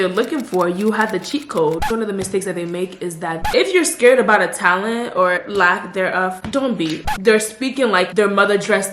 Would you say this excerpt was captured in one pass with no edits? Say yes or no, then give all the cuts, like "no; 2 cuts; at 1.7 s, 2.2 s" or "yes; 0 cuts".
no; 4 cuts; at 1.8 s, 3.4 s, 5.4 s, 7.0 s